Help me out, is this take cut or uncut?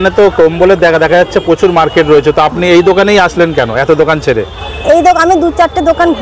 uncut